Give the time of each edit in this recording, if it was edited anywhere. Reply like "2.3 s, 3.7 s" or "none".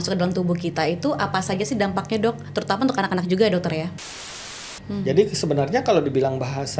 4.4 s